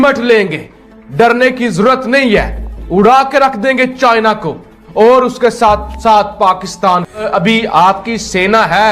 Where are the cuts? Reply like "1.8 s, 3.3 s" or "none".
7.3 s